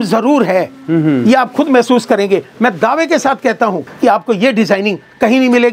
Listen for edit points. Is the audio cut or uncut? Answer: cut